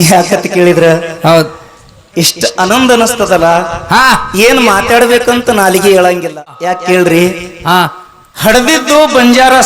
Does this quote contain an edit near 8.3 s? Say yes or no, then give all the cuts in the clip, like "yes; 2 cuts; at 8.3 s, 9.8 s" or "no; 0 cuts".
no; 1 cut; at 6.6 s